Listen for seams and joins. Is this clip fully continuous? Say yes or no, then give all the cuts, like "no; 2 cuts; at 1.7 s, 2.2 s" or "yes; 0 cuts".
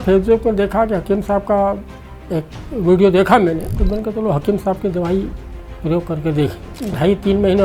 no; 2 cuts; at 3.7 s, 6.7 s